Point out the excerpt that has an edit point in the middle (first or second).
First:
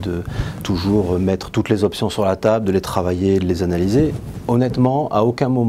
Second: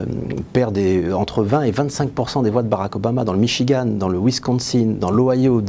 second